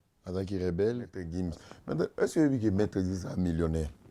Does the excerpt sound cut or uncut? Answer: cut